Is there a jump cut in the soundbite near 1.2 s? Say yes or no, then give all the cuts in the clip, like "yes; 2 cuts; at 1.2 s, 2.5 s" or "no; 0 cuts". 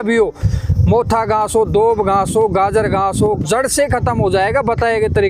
no; 1 cut; at 3.4 s